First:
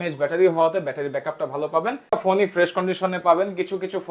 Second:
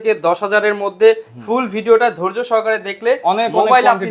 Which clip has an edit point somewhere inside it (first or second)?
first